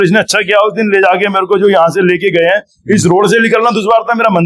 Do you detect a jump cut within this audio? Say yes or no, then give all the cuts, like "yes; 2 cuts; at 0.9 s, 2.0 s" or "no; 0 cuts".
no; 0 cuts